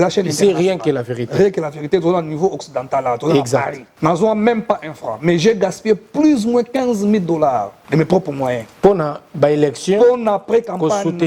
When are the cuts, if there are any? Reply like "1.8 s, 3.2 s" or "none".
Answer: 3.8 s, 7.8 s, 8.7 s